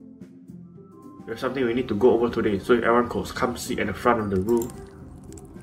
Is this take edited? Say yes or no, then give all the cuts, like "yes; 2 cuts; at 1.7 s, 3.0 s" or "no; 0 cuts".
yes; 1 cut; at 1.4 s